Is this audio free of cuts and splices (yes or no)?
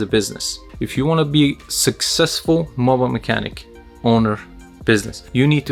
yes